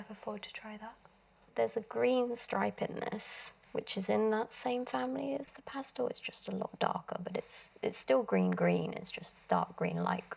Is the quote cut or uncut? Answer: cut